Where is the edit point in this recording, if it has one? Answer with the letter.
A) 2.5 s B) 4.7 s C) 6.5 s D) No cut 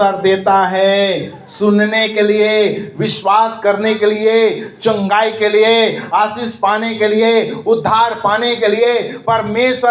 D